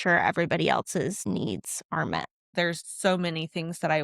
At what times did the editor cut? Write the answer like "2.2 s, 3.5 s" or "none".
2.6 s